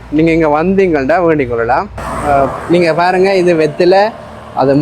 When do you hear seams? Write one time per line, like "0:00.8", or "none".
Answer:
0:02.1

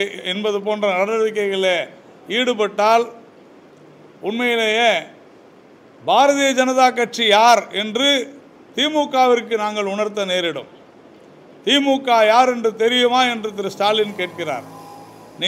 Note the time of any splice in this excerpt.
none

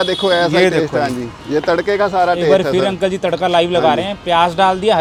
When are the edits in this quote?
none

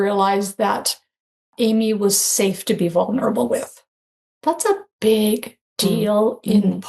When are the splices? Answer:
0:01.5

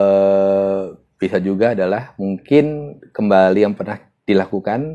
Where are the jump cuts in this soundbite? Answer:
none

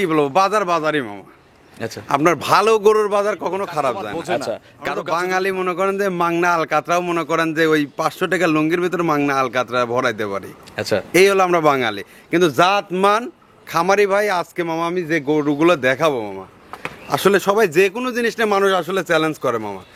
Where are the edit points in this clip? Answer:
0:04.7

